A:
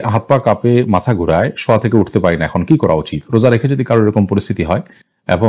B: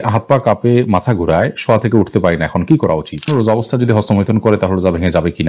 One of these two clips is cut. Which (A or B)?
B